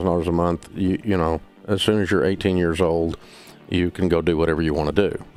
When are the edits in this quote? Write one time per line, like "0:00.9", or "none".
none